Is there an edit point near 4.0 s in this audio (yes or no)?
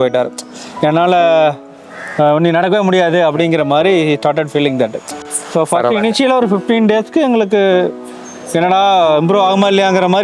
no